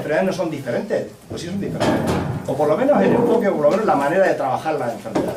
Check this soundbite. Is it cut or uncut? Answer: uncut